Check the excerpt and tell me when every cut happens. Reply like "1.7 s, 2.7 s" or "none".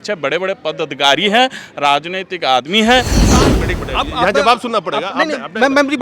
3.3 s